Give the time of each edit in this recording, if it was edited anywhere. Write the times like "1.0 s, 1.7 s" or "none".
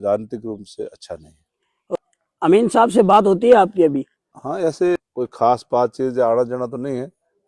2.0 s, 5.0 s